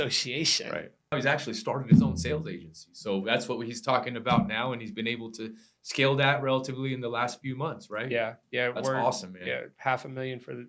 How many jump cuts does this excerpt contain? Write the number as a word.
one